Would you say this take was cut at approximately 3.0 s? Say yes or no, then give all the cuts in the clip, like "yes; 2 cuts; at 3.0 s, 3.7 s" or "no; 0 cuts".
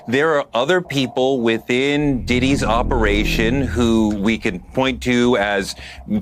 no; 0 cuts